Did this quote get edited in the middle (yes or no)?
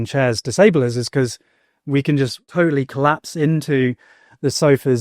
yes